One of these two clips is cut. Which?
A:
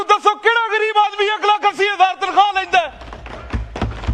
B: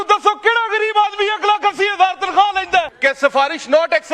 B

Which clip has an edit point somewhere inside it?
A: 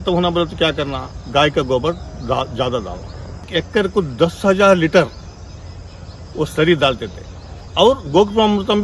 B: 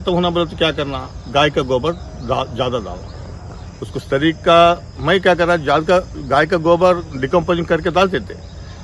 A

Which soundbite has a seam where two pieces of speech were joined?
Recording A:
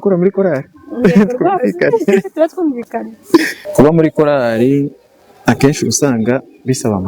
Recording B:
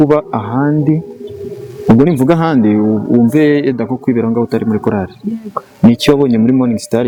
A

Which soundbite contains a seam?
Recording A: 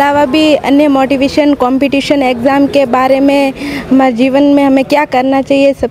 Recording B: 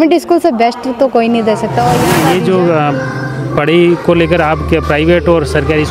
B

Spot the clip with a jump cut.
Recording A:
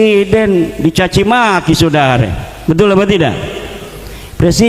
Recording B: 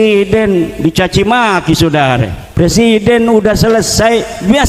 B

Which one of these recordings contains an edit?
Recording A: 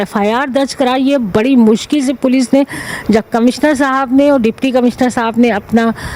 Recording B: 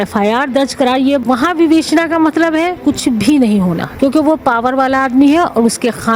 B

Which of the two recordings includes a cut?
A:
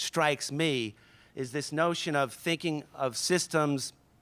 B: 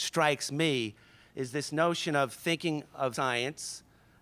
A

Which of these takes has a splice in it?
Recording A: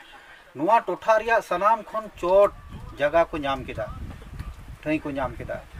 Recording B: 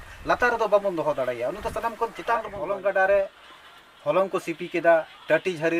B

